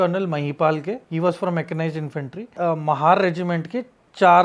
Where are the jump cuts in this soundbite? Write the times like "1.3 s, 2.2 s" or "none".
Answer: 1.0 s, 2.5 s